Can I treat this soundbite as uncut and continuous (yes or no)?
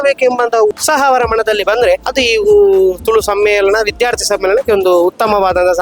no